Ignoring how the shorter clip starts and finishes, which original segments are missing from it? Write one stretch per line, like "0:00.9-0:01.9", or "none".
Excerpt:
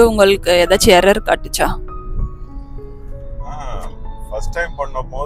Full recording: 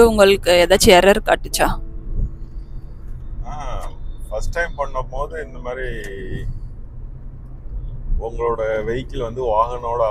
none